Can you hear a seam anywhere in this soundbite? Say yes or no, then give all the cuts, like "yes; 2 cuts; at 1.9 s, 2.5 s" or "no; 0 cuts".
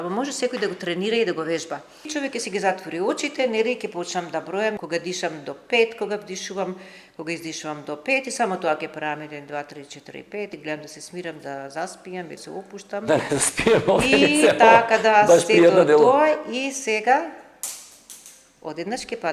yes; 4 cuts; at 2.1 s, 4.8 s, 10.5 s, 12.4 s